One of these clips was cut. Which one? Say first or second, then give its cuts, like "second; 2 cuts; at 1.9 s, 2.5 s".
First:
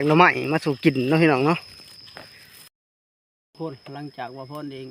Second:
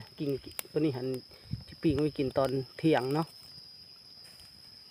first; 1 cut; at 2.9 s